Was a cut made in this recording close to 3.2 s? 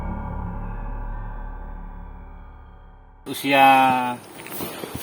yes; 1 cut; at 3.2 s

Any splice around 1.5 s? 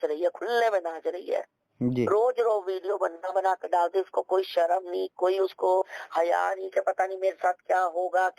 no; 0 cuts

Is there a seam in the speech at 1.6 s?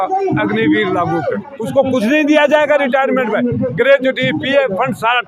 yes; 1 cut; at 1.6 s

